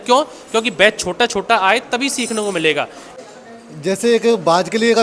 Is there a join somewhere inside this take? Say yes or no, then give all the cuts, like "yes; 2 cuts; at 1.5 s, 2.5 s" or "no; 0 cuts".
yes; 1 cut; at 3.0 s